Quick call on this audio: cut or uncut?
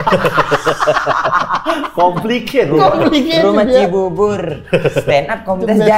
uncut